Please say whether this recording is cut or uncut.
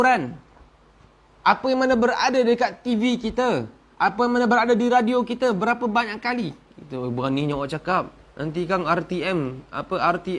uncut